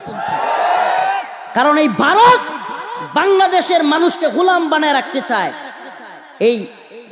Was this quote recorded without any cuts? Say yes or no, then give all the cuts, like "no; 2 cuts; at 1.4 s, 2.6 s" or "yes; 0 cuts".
yes; 0 cuts